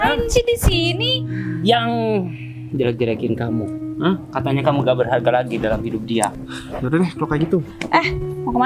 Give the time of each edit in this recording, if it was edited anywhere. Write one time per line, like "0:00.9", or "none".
0:06.3